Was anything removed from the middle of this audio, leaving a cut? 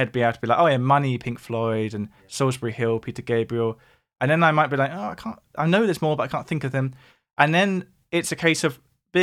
no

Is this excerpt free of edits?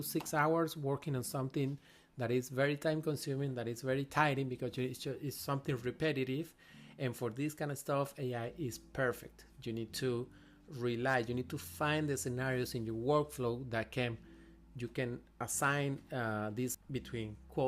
no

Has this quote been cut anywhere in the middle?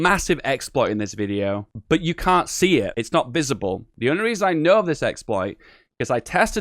yes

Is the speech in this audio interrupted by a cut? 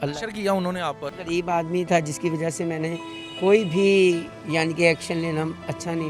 yes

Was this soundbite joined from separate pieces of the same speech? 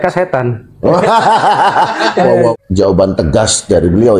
yes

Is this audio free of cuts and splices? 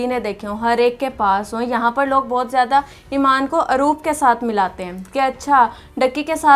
yes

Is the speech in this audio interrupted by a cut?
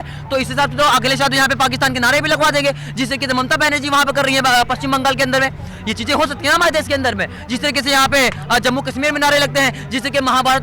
no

